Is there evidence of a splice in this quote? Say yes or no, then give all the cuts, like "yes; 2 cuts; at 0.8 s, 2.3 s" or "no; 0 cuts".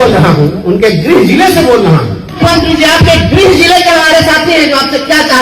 yes; 1 cut; at 2.4 s